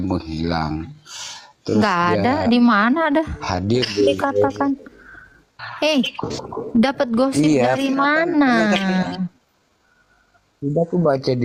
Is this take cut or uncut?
uncut